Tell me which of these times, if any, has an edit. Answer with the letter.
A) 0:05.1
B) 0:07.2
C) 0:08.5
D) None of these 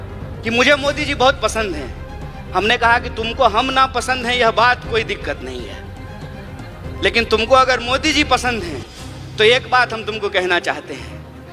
D